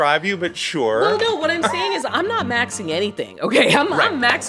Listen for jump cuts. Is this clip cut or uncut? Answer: uncut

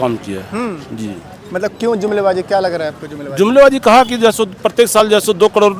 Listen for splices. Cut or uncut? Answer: uncut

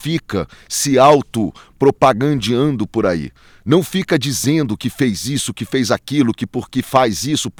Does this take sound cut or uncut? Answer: uncut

